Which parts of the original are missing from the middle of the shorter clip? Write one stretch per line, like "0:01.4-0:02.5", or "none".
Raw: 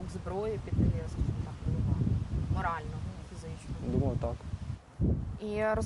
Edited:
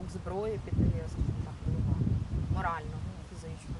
none